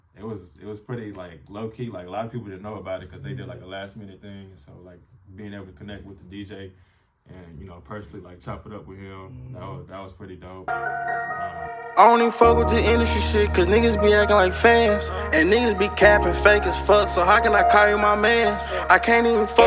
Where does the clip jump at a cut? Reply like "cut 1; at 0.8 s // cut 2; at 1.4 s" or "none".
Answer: cut 1; at 10.6 s